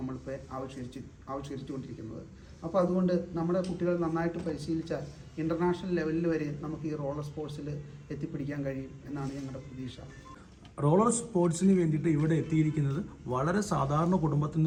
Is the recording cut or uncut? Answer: uncut